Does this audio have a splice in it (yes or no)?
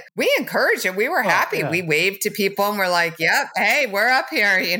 no